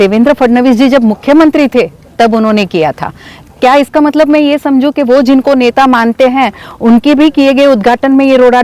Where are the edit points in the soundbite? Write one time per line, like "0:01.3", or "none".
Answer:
none